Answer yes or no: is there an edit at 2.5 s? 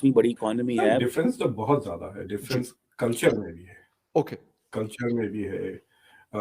no